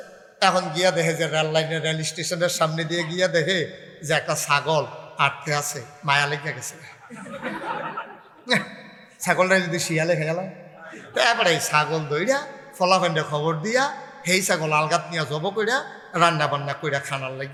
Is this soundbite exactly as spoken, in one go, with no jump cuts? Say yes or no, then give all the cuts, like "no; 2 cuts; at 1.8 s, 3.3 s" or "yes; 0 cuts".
yes; 0 cuts